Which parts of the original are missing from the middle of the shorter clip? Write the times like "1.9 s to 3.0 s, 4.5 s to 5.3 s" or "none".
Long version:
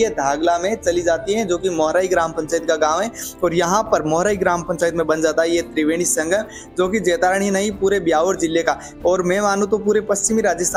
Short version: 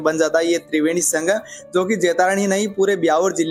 none